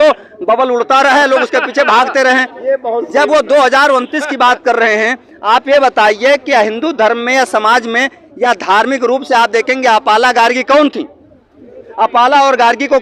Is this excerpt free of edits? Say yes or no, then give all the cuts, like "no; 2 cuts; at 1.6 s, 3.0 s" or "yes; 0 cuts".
yes; 0 cuts